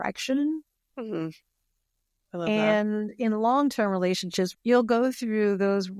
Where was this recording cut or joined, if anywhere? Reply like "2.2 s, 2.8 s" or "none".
4.5 s